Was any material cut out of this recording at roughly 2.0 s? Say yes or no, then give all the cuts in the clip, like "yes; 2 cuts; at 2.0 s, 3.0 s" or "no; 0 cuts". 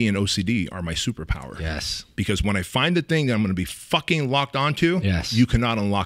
no; 0 cuts